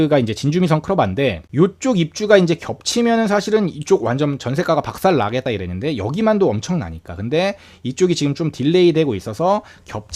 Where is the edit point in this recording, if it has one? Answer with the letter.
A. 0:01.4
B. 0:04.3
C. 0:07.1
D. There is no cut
A